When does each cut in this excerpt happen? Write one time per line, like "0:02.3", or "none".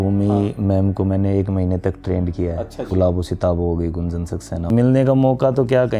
0:02.9
0:04.6